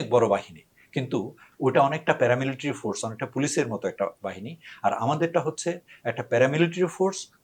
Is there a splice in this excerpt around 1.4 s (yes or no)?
yes